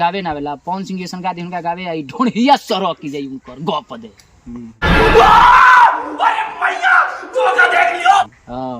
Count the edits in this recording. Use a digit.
0